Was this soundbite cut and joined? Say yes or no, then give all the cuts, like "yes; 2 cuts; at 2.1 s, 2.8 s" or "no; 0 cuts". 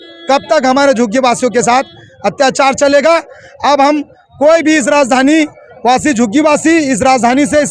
no; 0 cuts